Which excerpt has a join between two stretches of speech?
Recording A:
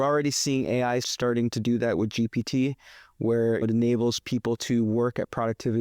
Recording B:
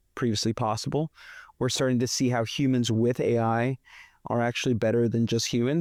A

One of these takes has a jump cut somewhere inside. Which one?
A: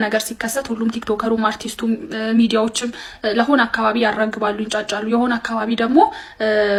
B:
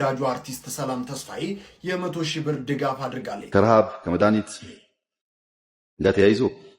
B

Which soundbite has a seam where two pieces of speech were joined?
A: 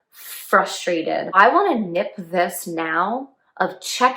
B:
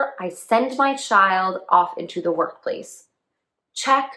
A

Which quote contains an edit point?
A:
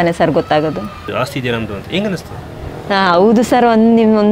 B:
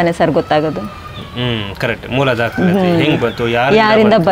A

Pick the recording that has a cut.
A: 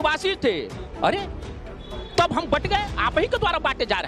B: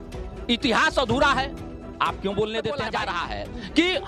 B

